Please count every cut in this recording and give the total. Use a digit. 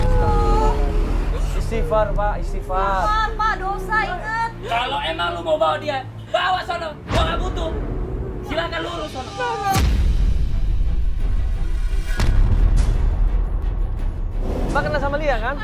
2